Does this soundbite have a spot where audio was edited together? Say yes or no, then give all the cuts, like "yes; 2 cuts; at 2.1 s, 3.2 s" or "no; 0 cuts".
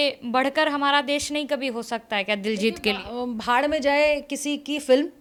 no; 0 cuts